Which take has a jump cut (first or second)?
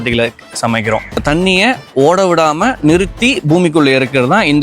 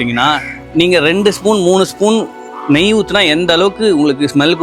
first